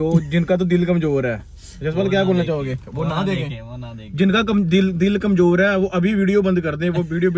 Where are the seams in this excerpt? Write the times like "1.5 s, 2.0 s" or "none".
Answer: none

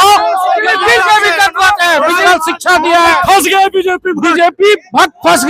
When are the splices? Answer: 2.2 s

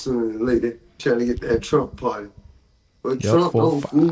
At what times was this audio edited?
0.9 s

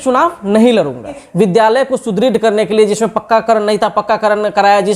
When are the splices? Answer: 1.2 s

